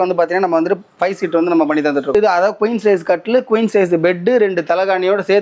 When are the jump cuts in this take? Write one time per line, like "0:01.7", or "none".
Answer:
0:02.1